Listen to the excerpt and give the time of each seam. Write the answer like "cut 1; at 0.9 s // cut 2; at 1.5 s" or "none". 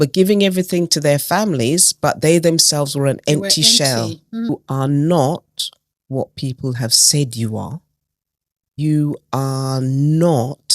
cut 1; at 4.5 s // cut 2; at 8.8 s

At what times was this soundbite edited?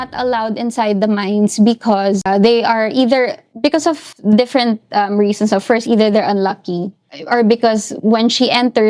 cut 1; at 2.2 s // cut 2; at 7.1 s

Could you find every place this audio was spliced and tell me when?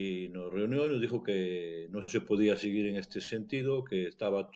none

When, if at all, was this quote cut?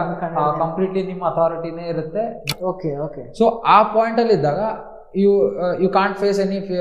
cut 1; at 2.5 s

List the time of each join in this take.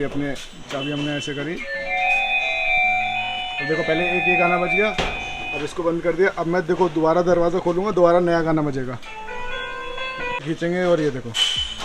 cut 1; at 10.4 s

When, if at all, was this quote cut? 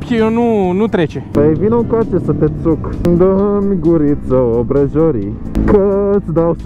none

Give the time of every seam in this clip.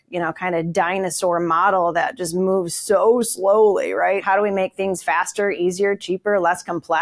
cut 1; at 4.2 s

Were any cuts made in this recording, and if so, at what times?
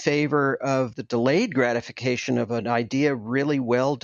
cut 1; at 1.0 s // cut 2; at 2.5 s

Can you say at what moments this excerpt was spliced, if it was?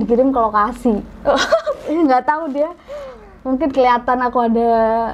none

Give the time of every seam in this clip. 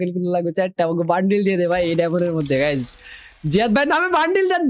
none

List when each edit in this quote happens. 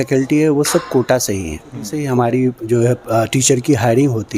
cut 1; at 2.0 s

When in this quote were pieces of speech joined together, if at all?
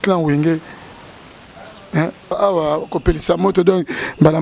cut 1; at 2.3 s

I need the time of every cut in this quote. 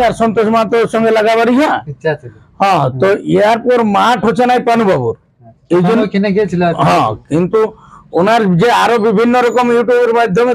none

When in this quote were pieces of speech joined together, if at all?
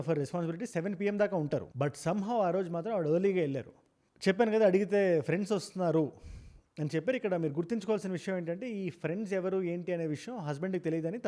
none

